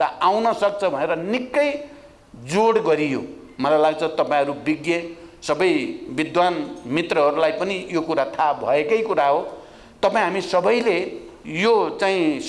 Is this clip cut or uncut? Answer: uncut